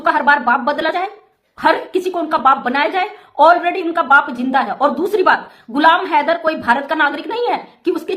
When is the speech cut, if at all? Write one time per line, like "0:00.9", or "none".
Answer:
none